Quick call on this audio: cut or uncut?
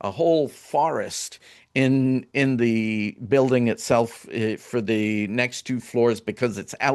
uncut